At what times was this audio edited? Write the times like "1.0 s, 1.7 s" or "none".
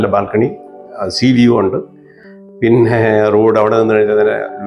none